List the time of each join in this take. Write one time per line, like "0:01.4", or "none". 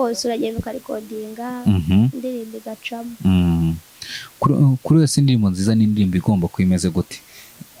none